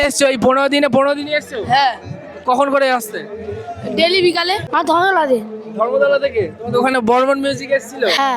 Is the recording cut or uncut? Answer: cut